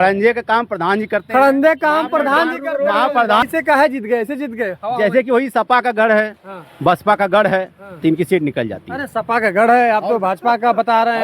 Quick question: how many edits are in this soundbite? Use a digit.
1